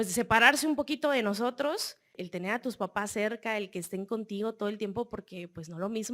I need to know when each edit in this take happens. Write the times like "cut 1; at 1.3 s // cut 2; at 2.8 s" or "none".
cut 1; at 2.1 s